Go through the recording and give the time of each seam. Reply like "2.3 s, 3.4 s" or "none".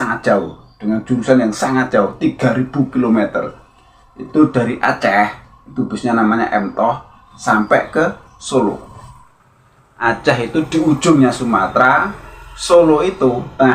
none